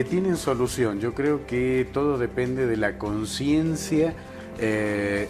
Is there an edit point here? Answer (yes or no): yes